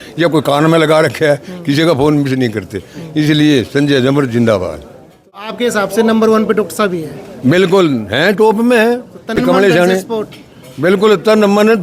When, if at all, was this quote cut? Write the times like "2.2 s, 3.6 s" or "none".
5.5 s, 9.4 s